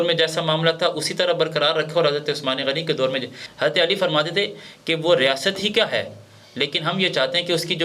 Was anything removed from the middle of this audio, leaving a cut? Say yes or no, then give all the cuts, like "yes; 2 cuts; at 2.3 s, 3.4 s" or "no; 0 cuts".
yes; 1 cut; at 3.4 s